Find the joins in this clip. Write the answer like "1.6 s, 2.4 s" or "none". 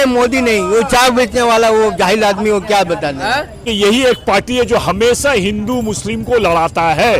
3.6 s